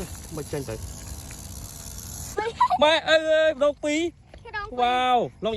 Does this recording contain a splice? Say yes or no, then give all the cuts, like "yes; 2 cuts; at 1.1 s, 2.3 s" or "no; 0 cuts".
yes; 1 cut; at 2.3 s